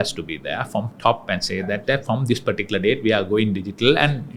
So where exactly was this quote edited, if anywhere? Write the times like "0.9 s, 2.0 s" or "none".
none